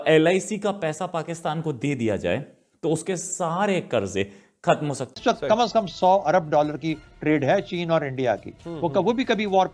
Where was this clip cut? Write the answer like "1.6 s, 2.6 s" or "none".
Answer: 5.2 s